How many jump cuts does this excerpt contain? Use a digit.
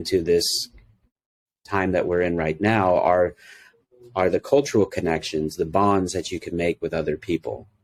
0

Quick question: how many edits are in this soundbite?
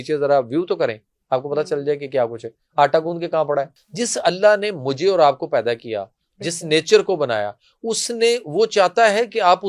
1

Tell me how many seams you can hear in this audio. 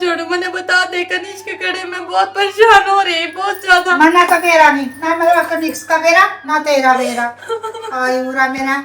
0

